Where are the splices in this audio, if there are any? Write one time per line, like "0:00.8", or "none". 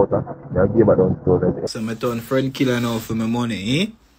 0:01.6